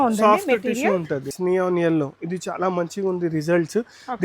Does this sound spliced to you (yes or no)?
yes